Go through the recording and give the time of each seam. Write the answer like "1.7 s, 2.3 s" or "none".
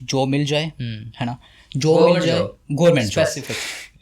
none